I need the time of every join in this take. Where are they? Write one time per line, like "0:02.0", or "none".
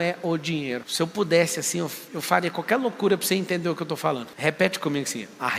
0:00.9
0:04.3